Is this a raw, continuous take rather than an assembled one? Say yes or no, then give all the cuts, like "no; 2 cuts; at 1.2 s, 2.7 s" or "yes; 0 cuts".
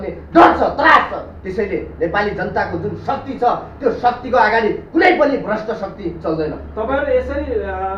yes; 0 cuts